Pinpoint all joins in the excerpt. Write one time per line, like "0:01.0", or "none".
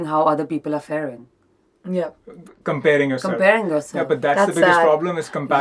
none